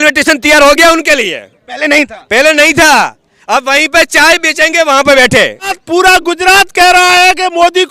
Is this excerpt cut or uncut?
cut